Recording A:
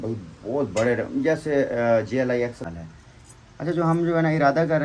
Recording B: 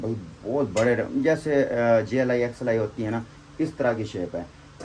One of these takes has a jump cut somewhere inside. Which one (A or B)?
A